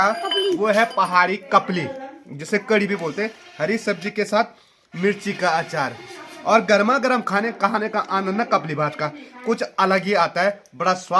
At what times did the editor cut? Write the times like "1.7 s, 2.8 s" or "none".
none